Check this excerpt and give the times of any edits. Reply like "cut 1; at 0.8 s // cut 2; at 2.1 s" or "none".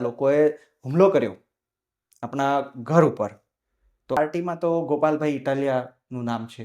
cut 1; at 4.2 s